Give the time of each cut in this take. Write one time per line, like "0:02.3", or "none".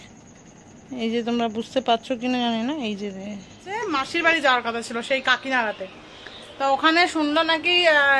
0:03.8